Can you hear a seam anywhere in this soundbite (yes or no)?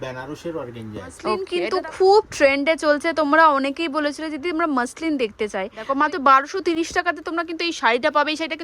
yes